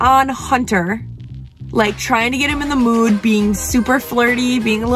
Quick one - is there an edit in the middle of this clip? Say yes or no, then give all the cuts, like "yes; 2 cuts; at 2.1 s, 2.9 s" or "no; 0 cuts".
no; 0 cuts